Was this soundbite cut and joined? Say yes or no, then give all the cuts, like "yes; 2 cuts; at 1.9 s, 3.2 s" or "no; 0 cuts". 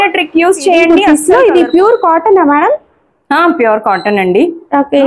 yes; 1 cut; at 1.0 s